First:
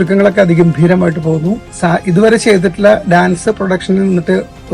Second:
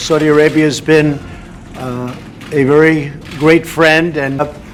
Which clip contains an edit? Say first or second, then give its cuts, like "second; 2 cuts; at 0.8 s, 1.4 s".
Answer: first; 1 cut; at 1.7 s